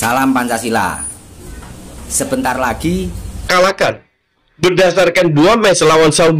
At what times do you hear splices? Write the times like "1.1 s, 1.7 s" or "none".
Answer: 3.5 s